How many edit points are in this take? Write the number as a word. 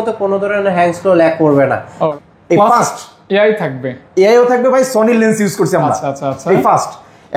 one